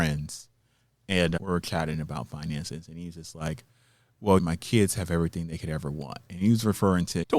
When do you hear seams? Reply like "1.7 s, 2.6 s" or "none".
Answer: 1.4 s